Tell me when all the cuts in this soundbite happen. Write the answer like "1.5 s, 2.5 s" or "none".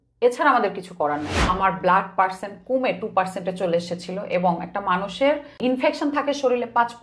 1.3 s, 5.6 s